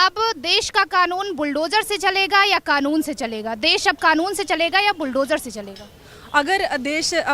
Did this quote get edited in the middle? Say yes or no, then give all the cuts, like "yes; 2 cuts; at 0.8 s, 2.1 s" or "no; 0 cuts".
no; 0 cuts